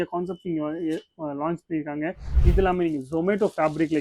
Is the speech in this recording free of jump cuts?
no; 1 cut; at 2.3 s

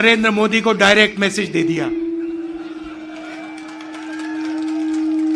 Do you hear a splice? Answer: no; 0 cuts

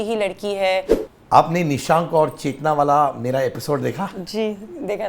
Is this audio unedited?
no; 1 cut; at 1.0 s

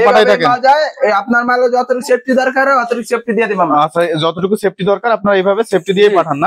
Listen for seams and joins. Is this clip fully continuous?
yes; 0 cuts

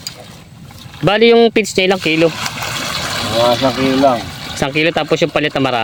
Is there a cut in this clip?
no; 0 cuts

